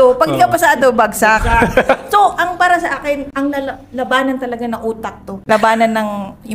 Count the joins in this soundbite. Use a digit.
1